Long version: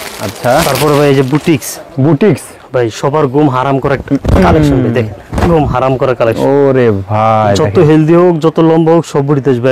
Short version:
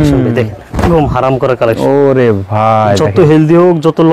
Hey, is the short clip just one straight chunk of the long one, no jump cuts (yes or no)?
yes